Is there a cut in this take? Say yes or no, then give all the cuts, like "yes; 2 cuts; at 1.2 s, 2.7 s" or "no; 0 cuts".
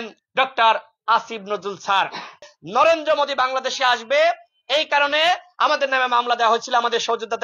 yes; 1 cut; at 2.6 s